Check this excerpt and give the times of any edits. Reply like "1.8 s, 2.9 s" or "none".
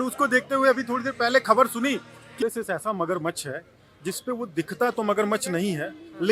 2.3 s